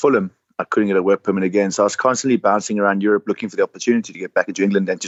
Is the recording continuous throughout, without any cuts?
yes; 0 cuts

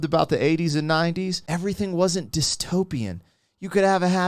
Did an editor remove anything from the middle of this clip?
yes; 1 cut; at 1.4 s

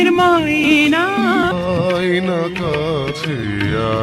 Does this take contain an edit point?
no; 0 cuts

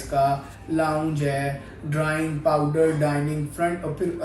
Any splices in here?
no; 0 cuts

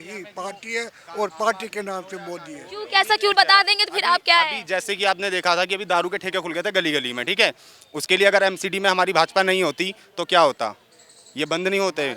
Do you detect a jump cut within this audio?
no; 0 cuts

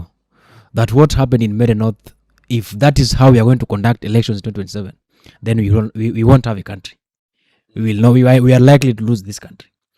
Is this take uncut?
yes; 0 cuts

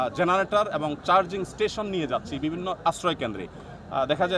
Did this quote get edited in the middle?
no; 0 cuts

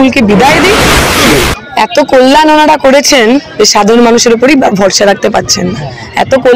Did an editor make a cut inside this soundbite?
yes; 1 cut; at 1.2 s

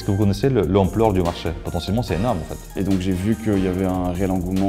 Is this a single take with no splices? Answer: no; 2 cuts; at 1.6 s, 2.7 s

